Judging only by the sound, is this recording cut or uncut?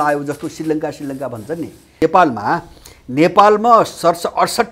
cut